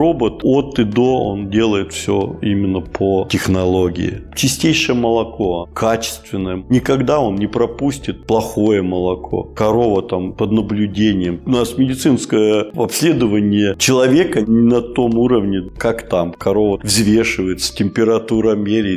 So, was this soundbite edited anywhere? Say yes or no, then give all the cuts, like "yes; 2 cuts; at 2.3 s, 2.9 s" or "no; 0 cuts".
no; 0 cuts